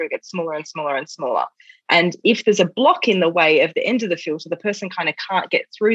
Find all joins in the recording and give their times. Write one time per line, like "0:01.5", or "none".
none